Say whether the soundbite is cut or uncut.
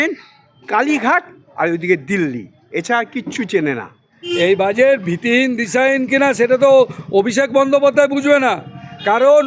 cut